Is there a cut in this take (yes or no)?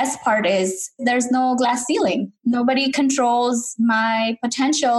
yes